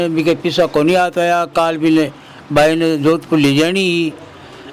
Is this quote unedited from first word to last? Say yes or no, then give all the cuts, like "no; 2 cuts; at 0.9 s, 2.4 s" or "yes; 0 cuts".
yes; 0 cuts